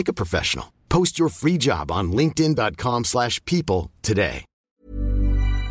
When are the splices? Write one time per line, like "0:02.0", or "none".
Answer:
0:04.5